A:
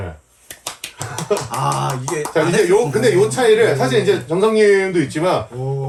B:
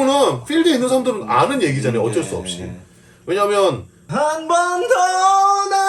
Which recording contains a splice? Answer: B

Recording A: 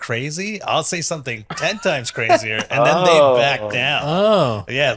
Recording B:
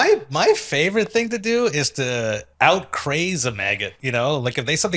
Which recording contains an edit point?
B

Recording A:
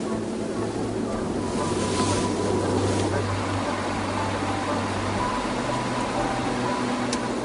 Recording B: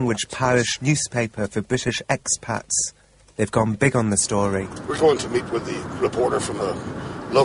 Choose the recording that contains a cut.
B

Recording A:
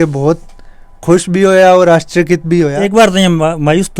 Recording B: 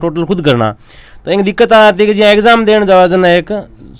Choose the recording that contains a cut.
A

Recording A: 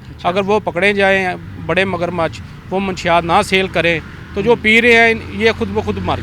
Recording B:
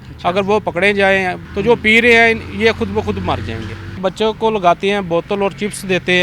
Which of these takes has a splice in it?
B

